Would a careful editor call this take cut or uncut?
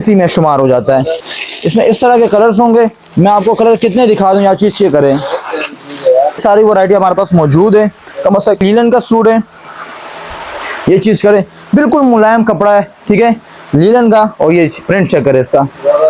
cut